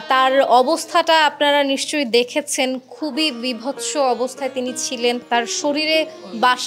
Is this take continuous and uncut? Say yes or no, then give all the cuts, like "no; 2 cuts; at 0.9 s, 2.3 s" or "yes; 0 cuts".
no; 1 cut; at 5.2 s